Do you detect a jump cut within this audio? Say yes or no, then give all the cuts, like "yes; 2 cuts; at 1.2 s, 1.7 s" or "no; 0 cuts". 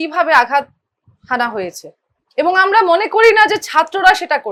no; 0 cuts